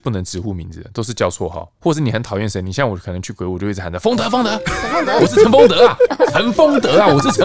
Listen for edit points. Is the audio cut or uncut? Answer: cut